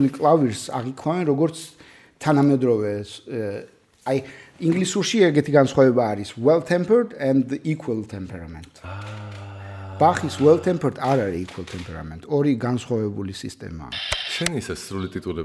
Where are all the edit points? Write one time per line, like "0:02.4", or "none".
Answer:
0:13.9